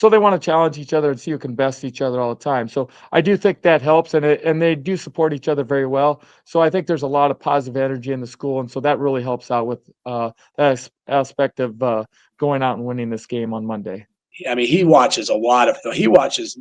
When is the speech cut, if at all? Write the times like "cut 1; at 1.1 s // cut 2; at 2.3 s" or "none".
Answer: cut 1; at 14.3 s

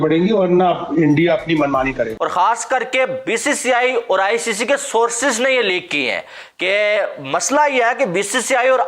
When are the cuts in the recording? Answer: cut 1; at 2.2 s

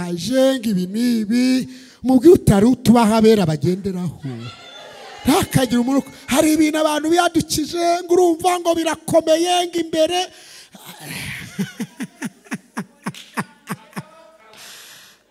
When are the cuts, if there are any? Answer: none

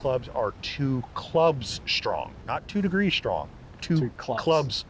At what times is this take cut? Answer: cut 1; at 2.4 s

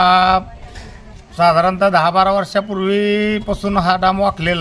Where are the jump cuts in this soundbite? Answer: none

